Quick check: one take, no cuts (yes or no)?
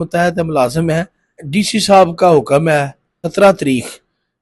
no